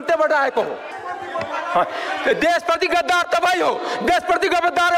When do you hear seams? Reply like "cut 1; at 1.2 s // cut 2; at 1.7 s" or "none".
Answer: cut 1; at 1.0 s

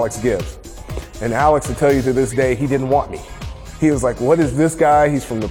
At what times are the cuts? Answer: none

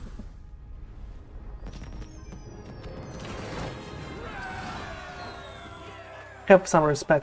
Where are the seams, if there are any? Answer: none

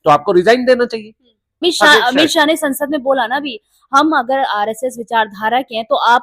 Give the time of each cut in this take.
cut 1; at 1.6 s

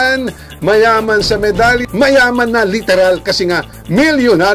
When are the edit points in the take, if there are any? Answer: cut 1; at 1.8 s

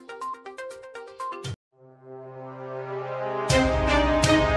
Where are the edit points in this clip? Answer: none

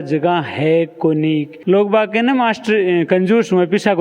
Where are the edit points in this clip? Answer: cut 1; at 1.5 s

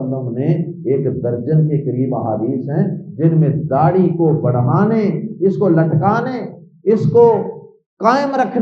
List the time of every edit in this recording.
none

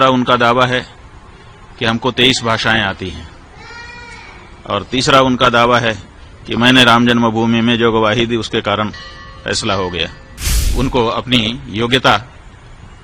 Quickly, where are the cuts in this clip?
cut 1; at 10.7 s

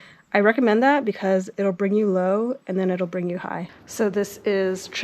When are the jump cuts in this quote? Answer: cut 1; at 3.8 s

